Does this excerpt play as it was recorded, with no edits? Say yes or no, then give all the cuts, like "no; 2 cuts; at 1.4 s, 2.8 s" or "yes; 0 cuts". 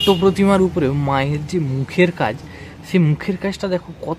yes; 0 cuts